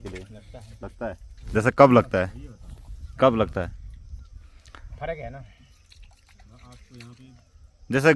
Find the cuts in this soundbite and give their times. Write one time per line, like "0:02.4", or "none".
none